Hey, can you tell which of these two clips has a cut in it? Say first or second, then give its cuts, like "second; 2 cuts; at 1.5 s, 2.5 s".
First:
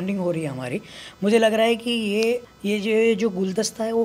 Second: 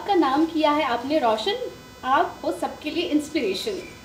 first; 1 cut; at 2.5 s